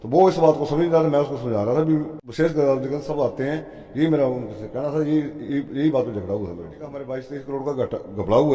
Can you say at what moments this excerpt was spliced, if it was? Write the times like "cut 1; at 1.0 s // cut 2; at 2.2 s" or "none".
cut 1; at 2.2 s // cut 2; at 7.1 s